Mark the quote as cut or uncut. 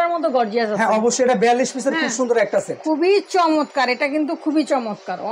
uncut